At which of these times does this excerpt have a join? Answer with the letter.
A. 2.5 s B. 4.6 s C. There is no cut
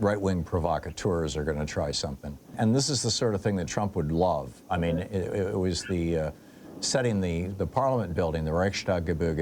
A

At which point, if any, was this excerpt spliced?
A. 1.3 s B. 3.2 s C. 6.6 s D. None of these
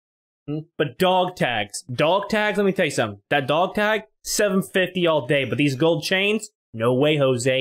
D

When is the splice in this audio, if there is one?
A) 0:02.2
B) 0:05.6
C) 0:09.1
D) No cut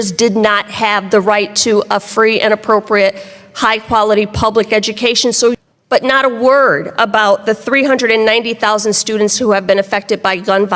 B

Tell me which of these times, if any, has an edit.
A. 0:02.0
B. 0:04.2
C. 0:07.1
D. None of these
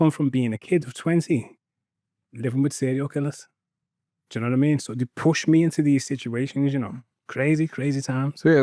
D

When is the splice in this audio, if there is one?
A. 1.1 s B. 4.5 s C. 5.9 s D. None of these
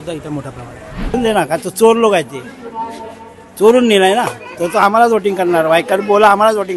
A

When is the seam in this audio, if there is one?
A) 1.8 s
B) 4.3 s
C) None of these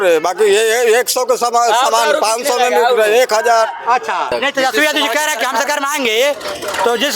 B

